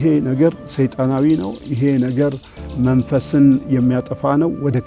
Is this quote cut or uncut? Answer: uncut